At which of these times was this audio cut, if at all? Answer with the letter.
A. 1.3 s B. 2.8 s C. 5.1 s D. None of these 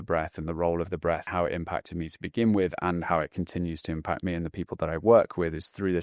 A